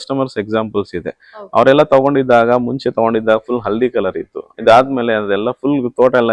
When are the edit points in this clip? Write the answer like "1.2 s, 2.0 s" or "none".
none